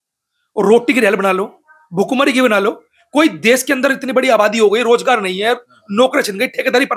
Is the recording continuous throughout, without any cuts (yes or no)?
yes